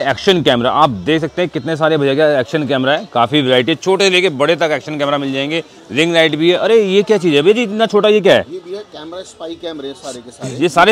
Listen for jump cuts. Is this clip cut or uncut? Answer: uncut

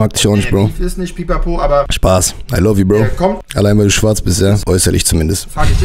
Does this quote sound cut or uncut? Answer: cut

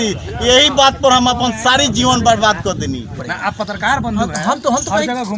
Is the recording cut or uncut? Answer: cut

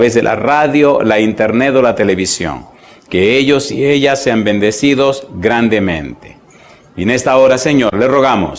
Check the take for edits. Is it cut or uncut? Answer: cut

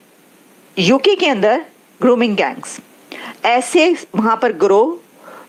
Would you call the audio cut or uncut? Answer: uncut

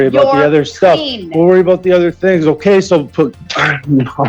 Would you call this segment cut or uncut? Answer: cut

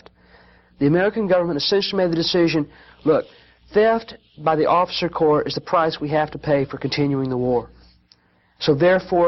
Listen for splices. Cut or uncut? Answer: uncut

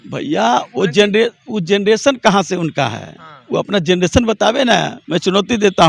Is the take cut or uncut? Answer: cut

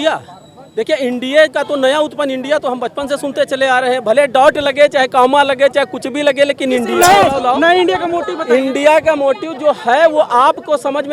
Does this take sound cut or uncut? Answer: cut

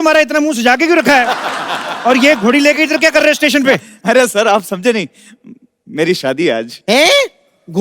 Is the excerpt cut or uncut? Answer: uncut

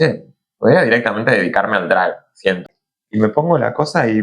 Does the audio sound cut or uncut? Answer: cut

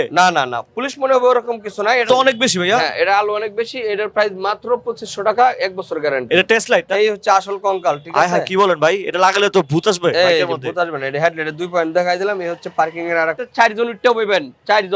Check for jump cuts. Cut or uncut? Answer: cut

